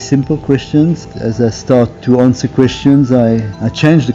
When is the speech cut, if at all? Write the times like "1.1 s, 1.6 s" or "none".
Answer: 1.0 s